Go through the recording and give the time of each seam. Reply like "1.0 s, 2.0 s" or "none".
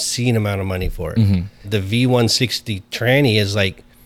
1.6 s